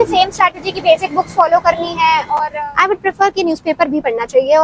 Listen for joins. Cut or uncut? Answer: cut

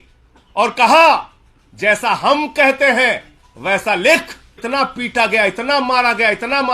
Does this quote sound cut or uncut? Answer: cut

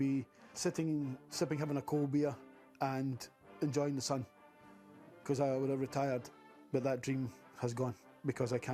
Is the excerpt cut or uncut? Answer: uncut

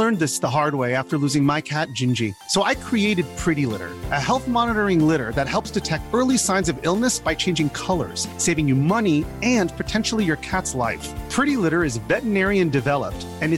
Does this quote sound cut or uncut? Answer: uncut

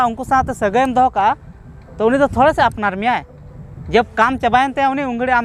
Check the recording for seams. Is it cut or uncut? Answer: uncut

